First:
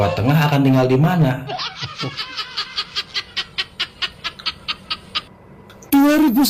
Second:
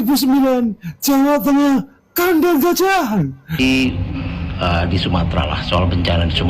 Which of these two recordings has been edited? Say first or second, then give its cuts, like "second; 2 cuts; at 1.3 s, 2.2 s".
second; 1 cut; at 3.5 s